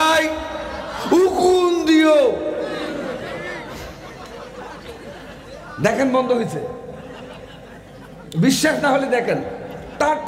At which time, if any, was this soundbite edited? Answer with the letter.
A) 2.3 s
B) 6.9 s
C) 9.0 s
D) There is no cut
D